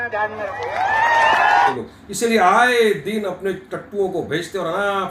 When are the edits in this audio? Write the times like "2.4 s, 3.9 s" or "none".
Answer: 1.7 s